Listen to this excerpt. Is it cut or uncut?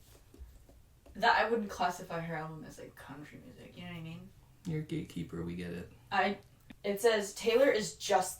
cut